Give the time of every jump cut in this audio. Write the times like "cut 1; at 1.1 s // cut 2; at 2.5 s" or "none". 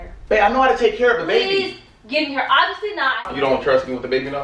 cut 1; at 3.2 s